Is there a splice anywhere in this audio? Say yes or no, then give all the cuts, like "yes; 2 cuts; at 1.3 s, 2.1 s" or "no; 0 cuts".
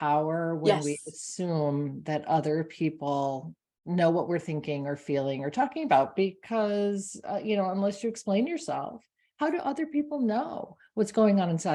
no; 0 cuts